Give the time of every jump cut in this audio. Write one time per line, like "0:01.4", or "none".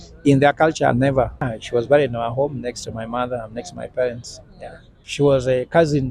0:01.6
0:05.0